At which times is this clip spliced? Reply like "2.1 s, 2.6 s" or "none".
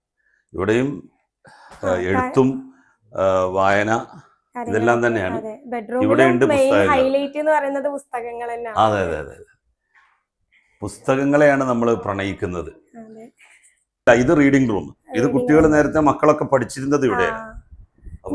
none

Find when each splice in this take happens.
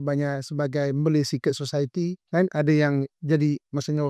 2.2 s

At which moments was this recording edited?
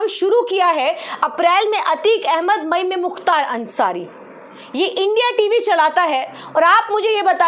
none

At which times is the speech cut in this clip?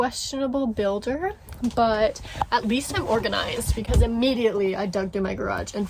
none

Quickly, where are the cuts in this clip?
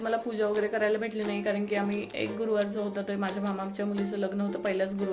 none

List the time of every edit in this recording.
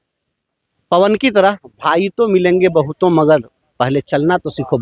none

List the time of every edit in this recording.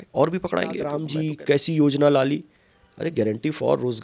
1.1 s

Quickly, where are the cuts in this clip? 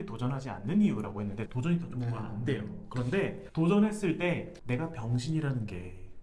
none

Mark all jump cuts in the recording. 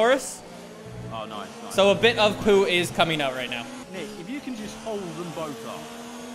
3.8 s

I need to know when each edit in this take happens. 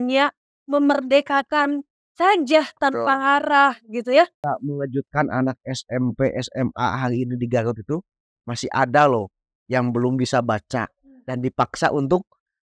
4.4 s

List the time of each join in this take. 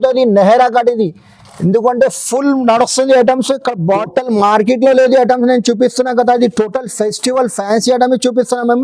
4.0 s

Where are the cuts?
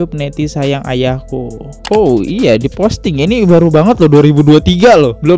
1.7 s

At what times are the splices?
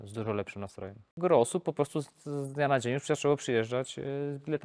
1.1 s

